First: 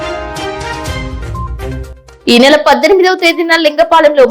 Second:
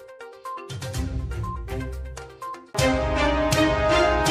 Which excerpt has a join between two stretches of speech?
first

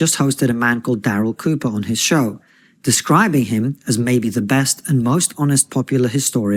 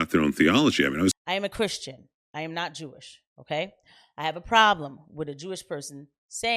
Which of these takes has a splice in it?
second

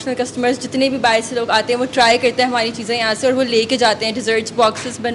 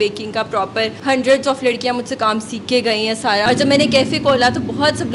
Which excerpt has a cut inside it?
second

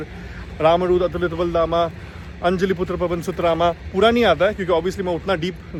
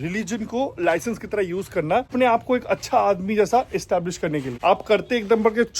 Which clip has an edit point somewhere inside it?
second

